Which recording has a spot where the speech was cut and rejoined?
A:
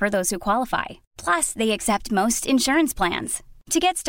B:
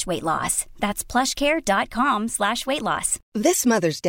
B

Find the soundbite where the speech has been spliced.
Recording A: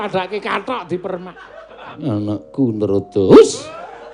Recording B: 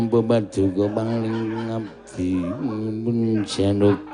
A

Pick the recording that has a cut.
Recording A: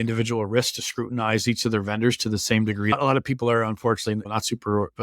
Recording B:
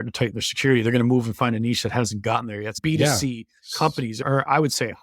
A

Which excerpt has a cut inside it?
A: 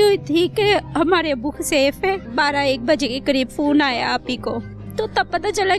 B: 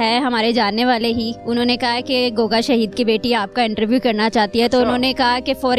A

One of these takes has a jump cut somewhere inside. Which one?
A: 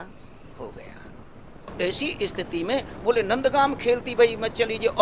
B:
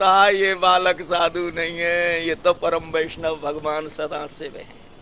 A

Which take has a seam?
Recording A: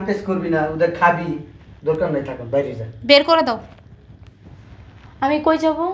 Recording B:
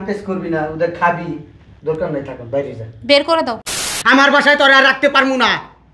B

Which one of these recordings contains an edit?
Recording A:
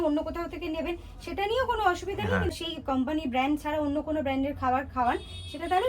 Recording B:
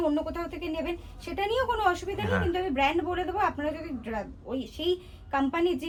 A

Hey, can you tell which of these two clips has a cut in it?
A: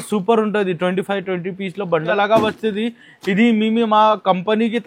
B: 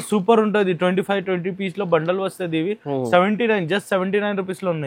A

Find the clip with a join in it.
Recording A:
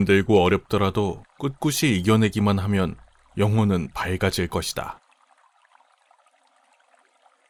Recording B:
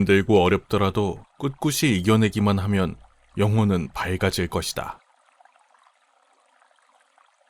B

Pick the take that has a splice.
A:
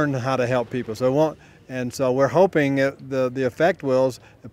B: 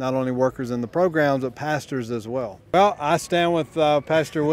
B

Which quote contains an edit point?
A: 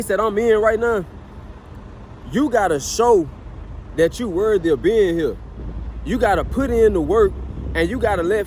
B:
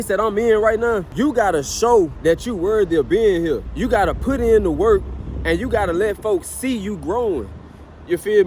B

